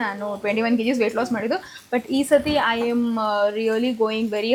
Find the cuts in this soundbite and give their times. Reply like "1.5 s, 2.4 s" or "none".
none

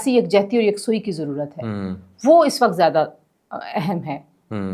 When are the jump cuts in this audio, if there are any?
none

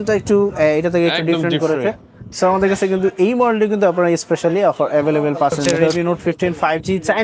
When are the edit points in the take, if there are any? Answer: 5.8 s

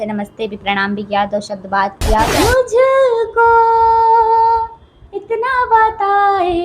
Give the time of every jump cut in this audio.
2.3 s

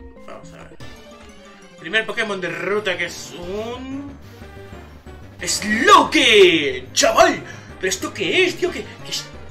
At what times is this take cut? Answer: none

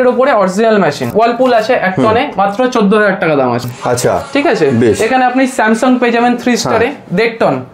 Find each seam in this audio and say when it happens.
1.1 s, 3.6 s

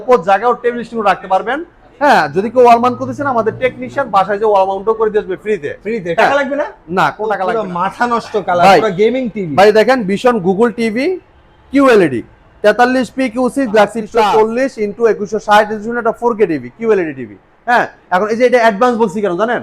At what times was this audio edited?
7.5 s, 14.0 s

